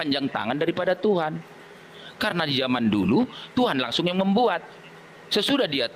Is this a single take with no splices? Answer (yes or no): yes